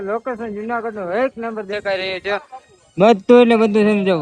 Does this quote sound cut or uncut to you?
uncut